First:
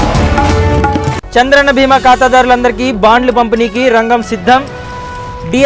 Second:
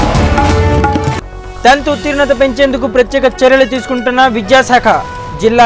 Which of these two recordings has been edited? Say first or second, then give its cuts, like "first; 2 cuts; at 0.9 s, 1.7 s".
second; 1 cut; at 1.1 s